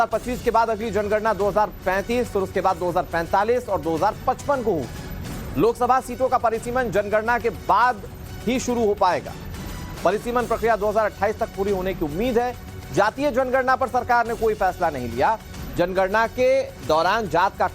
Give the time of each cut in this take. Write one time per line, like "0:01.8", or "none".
0:11.4